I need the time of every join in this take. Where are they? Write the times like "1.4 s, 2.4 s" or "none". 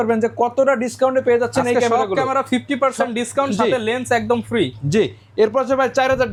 none